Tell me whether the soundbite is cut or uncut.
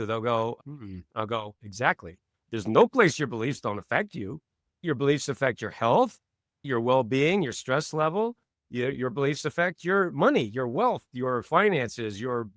uncut